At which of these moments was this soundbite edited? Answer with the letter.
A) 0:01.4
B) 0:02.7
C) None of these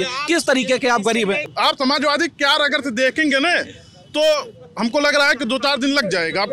A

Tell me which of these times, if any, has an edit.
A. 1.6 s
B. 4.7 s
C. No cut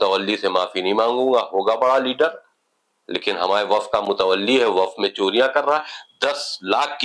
C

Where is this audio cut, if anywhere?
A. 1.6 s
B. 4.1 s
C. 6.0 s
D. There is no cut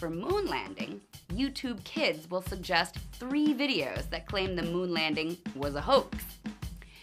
D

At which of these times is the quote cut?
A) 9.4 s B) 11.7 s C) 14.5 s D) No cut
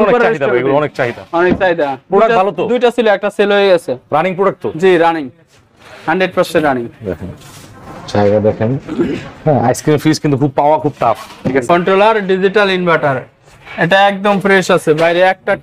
B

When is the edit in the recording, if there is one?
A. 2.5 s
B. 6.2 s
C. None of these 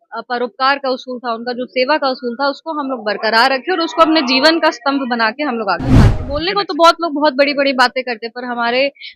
B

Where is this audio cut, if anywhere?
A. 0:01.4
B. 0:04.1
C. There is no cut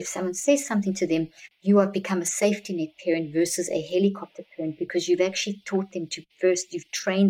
A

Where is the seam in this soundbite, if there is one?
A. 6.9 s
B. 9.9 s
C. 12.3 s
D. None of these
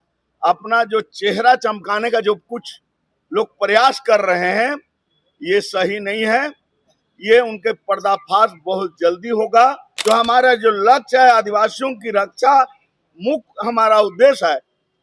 B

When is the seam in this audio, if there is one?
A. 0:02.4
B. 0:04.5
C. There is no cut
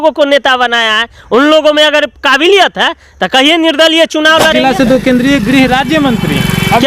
B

